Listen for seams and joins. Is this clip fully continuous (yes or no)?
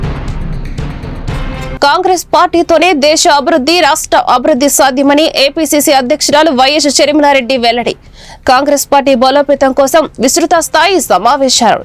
yes